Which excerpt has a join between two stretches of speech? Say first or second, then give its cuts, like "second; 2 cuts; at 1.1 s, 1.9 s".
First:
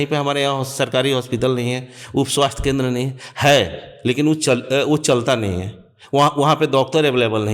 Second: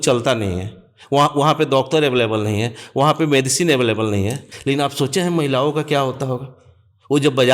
second; 1 cut; at 4.4 s